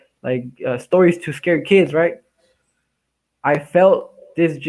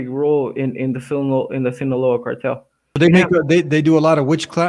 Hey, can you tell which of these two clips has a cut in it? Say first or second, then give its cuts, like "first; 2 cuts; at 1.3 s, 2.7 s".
second; 1 cut; at 2.9 s